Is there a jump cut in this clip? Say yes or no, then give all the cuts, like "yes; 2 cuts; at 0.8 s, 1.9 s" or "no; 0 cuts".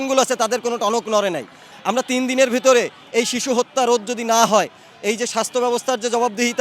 yes; 1 cut; at 1.6 s